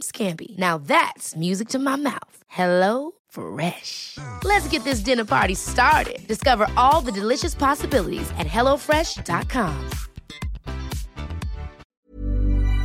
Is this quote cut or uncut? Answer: cut